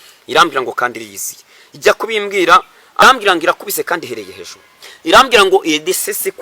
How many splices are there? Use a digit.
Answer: 1